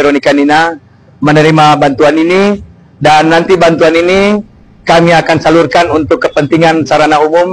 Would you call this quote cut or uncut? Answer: uncut